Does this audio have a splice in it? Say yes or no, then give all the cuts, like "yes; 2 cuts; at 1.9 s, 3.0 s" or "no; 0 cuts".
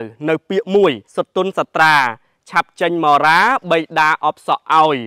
yes; 1 cut; at 1.0 s